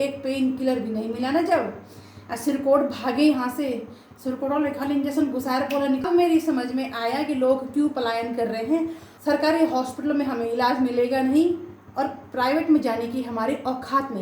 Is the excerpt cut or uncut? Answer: cut